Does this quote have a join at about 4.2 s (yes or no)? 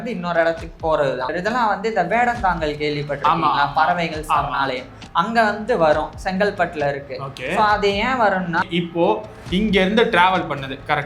no